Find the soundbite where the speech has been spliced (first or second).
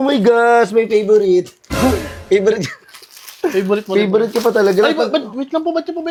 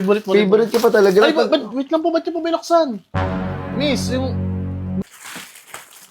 second